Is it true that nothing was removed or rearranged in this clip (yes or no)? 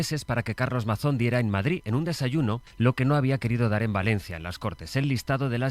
no